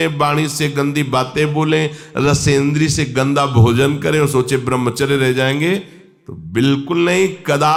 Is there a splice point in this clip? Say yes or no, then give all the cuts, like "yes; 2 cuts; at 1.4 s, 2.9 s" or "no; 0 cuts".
no; 0 cuts